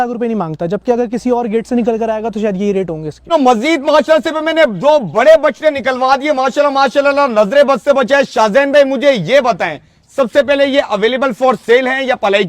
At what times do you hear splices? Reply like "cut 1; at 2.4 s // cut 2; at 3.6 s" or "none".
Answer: none